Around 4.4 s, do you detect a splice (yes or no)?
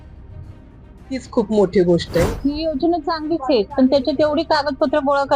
no